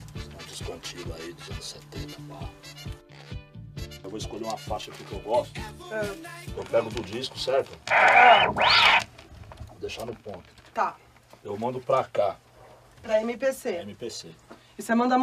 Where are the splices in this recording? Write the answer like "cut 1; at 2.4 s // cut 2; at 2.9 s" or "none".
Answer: cut 1; at 1.2 s